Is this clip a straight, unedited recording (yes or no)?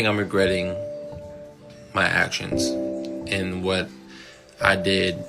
yes